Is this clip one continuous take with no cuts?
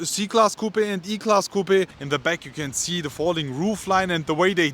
no; 1 cut; at 2.0 s

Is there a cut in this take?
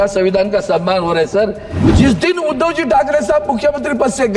yes; 1 cut; at 1.8 s

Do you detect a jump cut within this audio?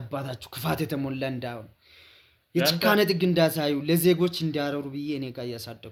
no; 0 cuts

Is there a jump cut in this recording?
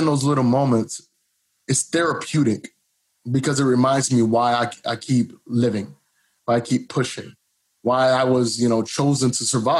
no; 0 cuts

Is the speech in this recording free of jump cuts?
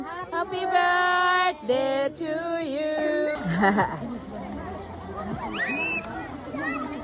yes; 0 cuts

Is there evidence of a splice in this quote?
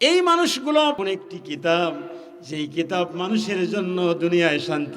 yes; 1 cut; at 1.0 s

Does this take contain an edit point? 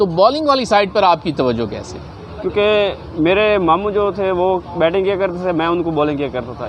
no; 0 cuts

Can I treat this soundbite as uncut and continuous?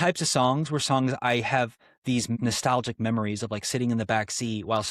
no; 1 cut; at 2.4 s

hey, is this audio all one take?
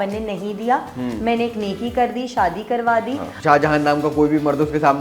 no; 1 cut; at 3.3 s

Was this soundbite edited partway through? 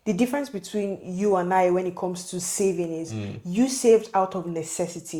no; 0 cuts

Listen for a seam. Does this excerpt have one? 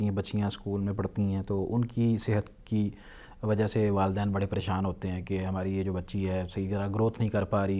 no; 0 cuts

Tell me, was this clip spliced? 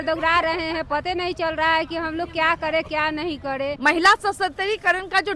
yes; 1 cut; at 3.8 s

